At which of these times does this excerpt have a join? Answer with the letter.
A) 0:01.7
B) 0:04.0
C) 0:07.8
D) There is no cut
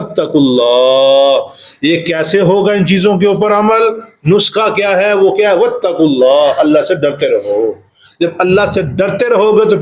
D